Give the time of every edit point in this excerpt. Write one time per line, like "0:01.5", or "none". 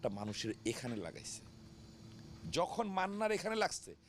none